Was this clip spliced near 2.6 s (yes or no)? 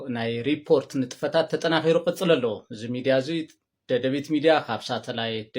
no